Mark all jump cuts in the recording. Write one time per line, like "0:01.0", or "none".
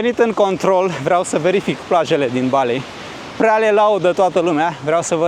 none